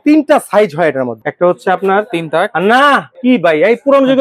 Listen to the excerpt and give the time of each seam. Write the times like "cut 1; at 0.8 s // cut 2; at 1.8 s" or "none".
cut 1; at 1.2 s // cut 2; at 3.1 s

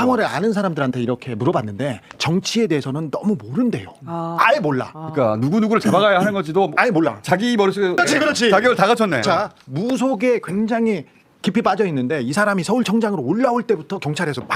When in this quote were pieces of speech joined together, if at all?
cut 1; at 8.0 s

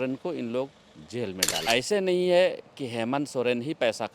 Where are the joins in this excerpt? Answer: cut 1; at 1.6 s

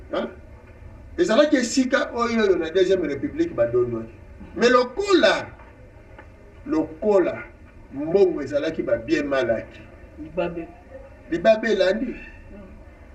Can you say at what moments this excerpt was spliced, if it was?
none

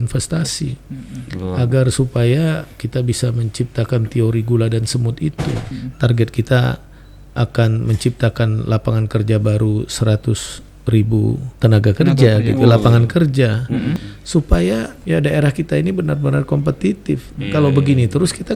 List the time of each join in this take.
cut 1; at 5.7 s // cut 2; at 11.5 s // cut 3; at 14.1 s // cut 4; at 14.9 s

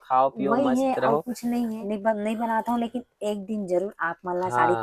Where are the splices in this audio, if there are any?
cut 1; at 1.8 s

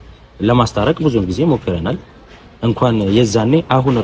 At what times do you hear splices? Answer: none

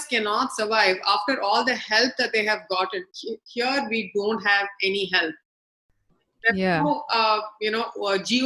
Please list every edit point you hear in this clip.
none

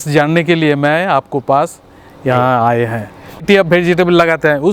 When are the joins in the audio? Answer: cut 1; at 3.4 s

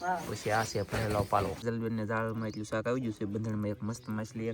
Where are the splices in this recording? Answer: cut 1; at 1.6 s

